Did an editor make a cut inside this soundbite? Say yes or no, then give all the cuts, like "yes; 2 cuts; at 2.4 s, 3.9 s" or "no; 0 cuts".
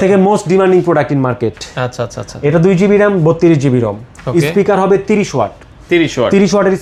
no; 0 cuts